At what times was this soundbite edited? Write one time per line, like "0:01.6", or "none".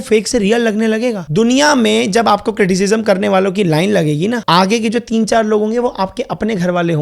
0:01.2
0:04.4